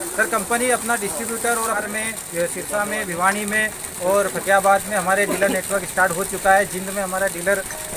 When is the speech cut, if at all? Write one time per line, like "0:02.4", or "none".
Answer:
0:01.8